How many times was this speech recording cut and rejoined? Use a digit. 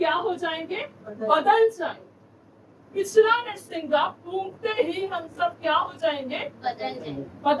0